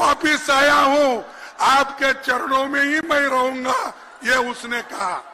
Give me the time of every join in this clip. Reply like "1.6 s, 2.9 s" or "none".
none